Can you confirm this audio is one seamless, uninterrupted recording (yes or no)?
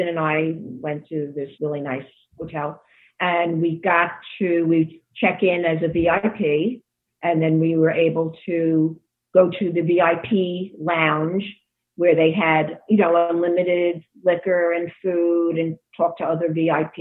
no